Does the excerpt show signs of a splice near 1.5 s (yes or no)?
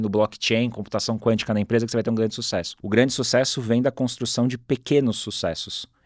no